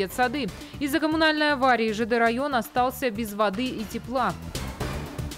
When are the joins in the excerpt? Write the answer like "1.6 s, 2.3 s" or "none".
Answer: none